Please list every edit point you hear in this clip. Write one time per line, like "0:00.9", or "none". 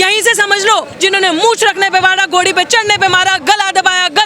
0:00.9